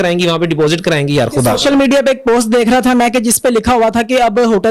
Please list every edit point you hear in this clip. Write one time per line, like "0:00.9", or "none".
none